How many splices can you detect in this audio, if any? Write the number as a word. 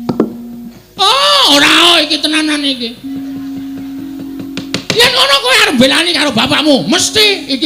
one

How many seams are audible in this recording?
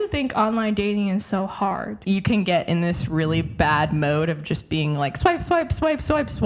one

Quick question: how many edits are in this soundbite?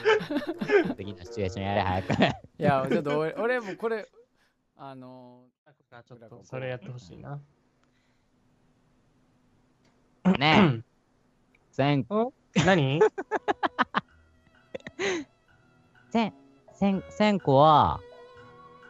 one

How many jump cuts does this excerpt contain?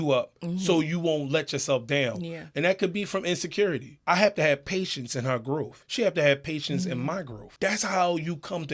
three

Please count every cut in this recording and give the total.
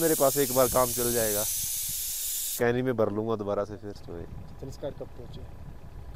one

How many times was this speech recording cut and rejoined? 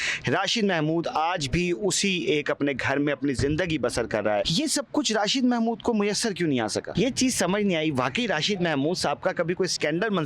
two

